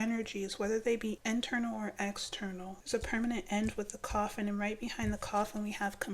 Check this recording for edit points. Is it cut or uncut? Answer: cut